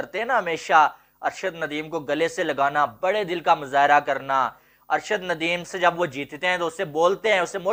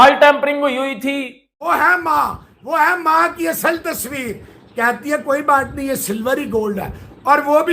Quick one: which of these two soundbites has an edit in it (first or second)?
second